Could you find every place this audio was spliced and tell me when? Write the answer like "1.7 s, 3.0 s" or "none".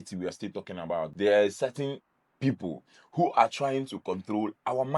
1.1 s